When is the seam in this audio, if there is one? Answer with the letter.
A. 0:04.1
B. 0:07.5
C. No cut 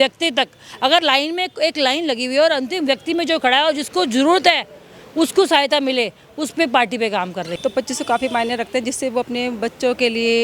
B